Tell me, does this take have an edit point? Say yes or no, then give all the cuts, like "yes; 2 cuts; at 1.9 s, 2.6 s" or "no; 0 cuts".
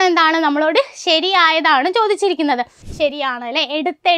yes; 1 cut; at 2.8 s